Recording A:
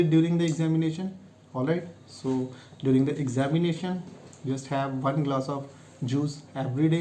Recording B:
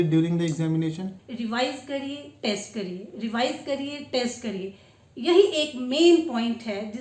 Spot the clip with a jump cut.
B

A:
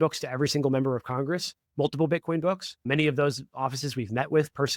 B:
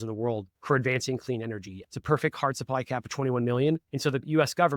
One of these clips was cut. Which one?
B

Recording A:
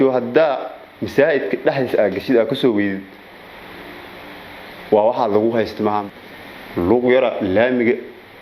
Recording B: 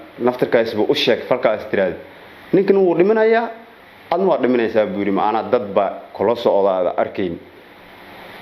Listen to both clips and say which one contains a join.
A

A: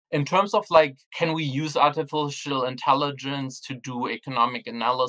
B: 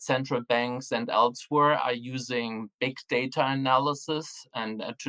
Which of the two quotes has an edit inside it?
A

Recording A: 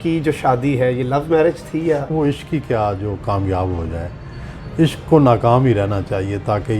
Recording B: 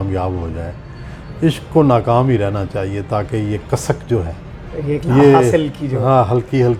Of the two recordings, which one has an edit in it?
A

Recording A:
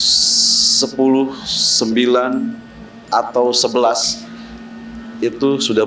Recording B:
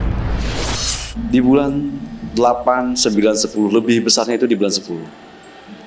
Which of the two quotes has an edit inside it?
B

